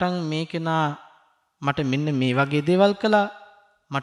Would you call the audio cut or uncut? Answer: uncut